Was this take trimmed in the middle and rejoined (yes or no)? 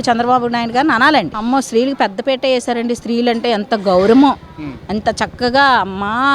yes